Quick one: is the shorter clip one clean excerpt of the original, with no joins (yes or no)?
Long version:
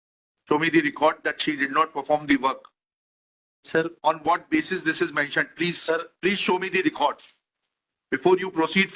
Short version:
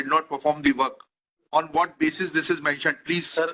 no